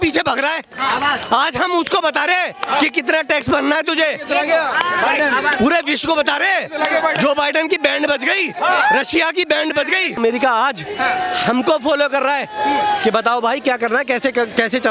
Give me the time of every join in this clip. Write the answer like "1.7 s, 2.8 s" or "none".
10.2 s